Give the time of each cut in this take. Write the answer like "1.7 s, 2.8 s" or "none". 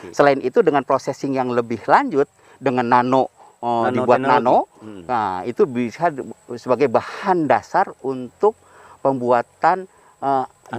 none